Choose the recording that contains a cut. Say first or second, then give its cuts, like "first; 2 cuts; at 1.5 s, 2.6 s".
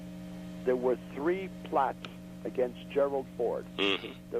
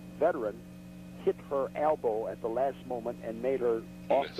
first; 1 cut; at 1.4 s